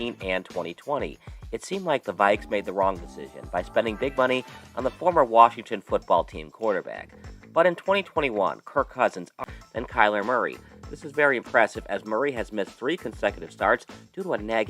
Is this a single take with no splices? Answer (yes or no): no